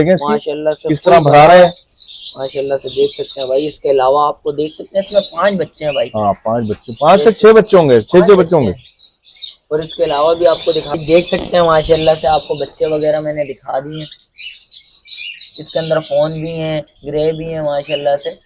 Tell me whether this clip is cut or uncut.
uncut